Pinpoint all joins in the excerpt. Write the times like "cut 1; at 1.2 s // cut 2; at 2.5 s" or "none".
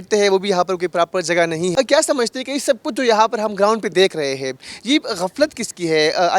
cut 1; at 1.7 s